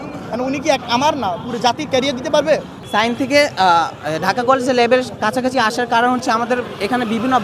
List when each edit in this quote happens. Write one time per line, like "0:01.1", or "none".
0:02.8